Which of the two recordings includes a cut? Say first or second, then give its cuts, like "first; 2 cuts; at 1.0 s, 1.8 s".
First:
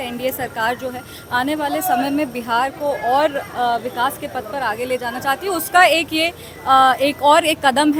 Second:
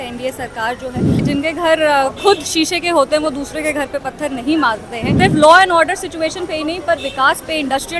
second; 2 cuts; at 1.2 s, 5.1 s